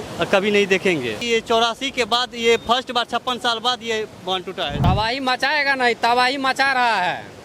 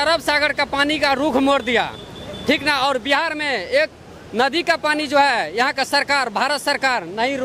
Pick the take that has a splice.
first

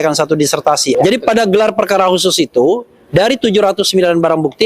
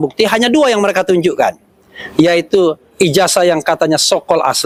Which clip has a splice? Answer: first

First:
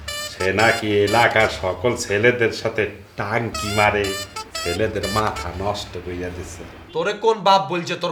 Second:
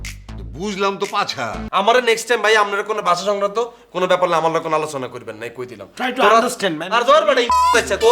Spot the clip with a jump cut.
second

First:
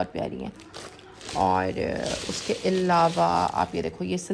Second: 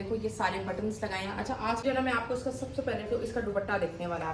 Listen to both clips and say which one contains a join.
second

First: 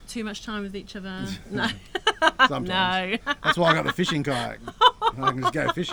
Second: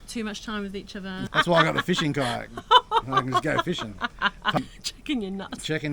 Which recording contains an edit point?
second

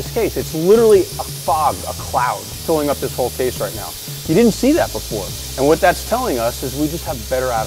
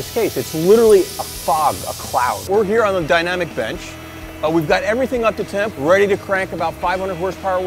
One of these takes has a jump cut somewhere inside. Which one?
second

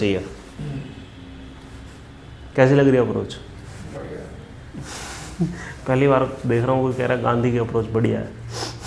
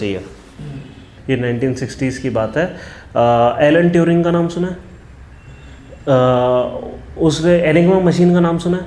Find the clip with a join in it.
second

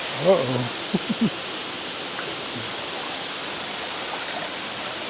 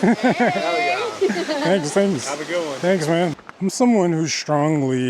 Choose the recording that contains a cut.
second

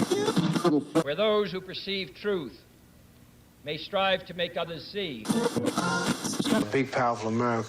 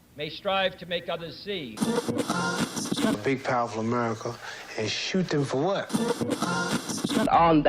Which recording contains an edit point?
first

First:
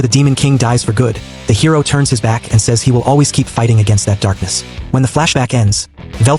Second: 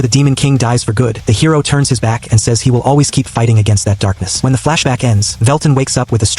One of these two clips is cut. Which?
second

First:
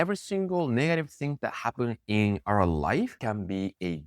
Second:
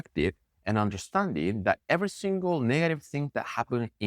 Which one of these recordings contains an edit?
first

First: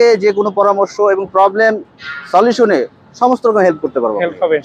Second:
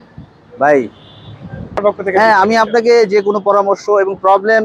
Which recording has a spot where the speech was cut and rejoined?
second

